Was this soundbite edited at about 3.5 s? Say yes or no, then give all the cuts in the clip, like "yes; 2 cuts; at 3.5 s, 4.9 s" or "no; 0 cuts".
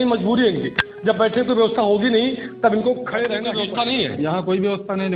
yes; 1 cut; at 3.5 s